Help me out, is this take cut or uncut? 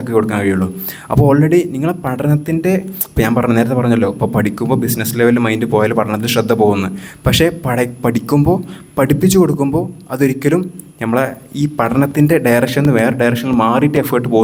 uncut